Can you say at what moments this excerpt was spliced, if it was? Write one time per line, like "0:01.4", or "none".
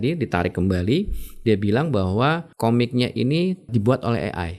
0:02.5
0:03.7